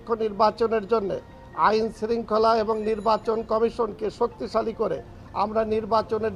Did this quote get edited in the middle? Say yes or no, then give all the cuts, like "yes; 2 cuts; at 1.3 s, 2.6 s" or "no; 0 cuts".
no; 0 cuts